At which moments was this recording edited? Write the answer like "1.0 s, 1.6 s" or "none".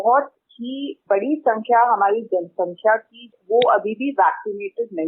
1.0 s, 3.3 s